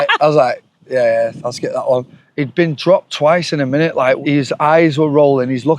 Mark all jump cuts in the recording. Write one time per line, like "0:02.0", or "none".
0:02.2
0:04.2